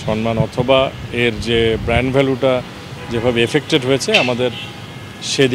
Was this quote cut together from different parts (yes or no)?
no